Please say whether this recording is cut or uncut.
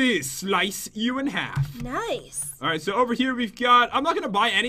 cut